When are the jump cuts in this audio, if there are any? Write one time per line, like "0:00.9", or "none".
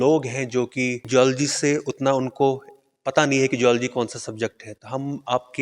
0:01.1